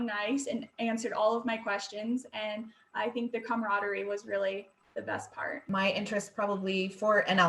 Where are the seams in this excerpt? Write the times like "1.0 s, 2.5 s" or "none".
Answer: 5.5 s